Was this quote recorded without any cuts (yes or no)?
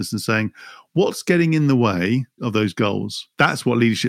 no